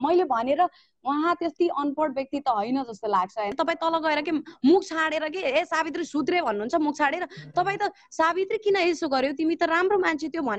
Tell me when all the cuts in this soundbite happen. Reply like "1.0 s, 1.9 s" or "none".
3.5 s